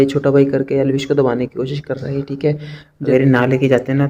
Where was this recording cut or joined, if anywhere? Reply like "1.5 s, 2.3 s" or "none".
2.9 s